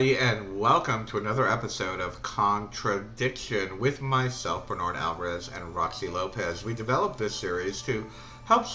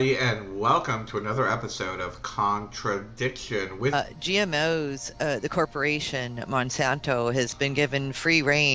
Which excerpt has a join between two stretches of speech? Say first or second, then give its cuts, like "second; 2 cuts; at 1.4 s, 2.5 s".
first; 1 cut; at 3.9 s